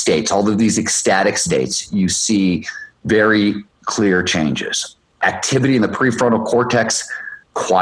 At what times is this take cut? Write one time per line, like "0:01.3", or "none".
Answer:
none